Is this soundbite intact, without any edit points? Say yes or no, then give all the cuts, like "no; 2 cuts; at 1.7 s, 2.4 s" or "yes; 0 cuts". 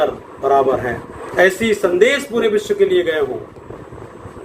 no; 1 cut; at 1.1 s